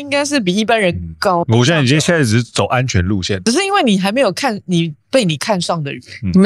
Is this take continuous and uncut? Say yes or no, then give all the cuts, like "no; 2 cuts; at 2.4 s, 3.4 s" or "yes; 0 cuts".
no; 2 cuts; at 1.4 s, 3.3 s